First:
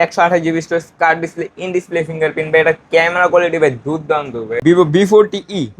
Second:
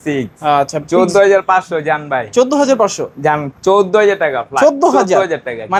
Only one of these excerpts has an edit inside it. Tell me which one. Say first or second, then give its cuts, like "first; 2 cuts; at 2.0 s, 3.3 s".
first; 1 cut; at 4.6 s